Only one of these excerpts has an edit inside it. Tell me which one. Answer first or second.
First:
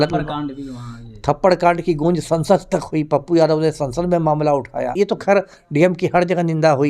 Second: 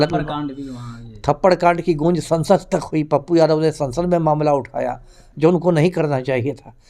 first